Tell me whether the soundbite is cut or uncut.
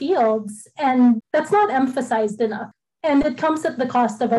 cut